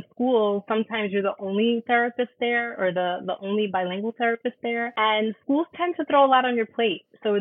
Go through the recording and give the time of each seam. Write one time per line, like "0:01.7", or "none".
0:04.9